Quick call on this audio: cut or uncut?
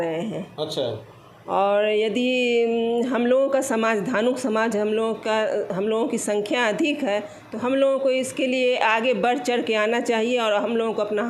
uncut